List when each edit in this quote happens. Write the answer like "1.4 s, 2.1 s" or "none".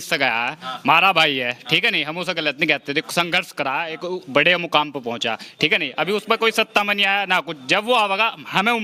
none